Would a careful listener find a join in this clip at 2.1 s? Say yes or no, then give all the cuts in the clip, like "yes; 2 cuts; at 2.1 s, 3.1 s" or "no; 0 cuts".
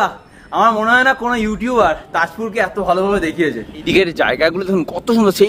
no; 1 cut; at 3.9 s